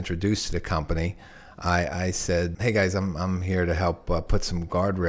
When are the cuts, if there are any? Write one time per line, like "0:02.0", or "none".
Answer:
0:02.5